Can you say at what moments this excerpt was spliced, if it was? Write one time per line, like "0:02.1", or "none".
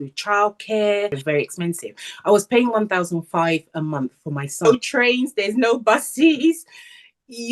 0:01.2
0:04.6